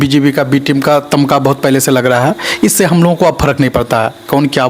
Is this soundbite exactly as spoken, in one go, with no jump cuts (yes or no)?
yes